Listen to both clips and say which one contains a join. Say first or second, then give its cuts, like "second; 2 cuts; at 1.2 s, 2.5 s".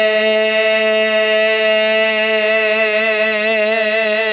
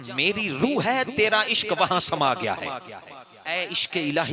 second; 1 cut; at 3.4 s